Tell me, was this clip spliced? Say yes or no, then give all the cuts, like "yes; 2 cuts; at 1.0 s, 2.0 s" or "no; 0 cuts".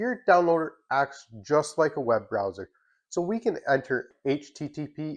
yes; 1 cut; at 4.0 s